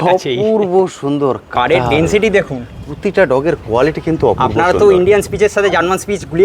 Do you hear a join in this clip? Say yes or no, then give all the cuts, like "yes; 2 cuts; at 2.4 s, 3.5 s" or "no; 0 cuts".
yes; 1 cut; at 1.4 s